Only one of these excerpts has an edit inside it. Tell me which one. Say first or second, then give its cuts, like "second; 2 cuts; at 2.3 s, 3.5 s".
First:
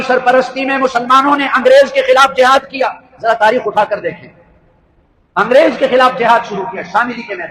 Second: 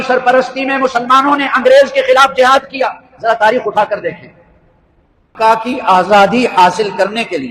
second; 1 cut; at 5.3 s